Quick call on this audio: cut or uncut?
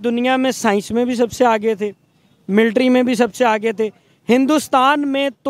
uncut